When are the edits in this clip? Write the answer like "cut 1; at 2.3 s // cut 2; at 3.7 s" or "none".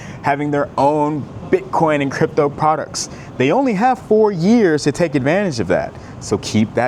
none